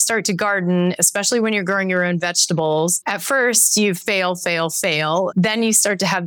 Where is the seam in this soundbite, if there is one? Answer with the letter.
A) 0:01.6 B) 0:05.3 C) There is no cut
B